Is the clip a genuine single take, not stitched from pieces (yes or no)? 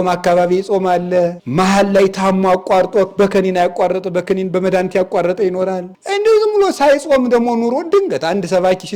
no